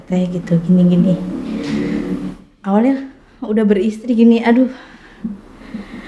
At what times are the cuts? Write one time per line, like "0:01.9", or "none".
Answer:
none